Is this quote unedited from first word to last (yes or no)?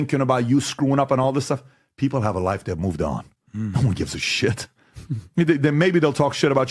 yes